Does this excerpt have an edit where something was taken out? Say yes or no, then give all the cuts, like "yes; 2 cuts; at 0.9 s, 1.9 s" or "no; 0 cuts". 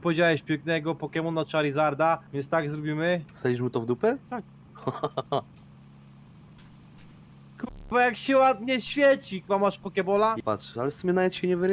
no; 0 cuts